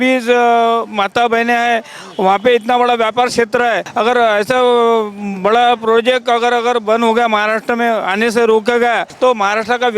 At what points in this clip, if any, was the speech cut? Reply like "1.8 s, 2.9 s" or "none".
3.9 s, 9.1 s